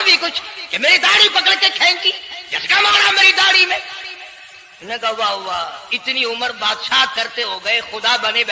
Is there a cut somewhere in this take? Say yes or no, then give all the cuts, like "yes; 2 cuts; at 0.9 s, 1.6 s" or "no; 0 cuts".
no; 0 cuts